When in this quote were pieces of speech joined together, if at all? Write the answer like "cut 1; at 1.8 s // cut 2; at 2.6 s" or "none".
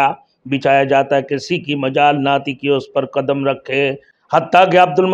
cut 1; at 4.1 s